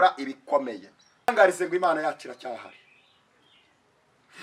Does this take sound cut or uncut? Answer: cut